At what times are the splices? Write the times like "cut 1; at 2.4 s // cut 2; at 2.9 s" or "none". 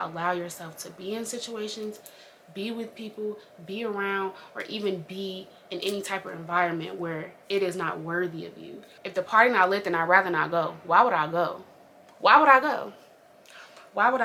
none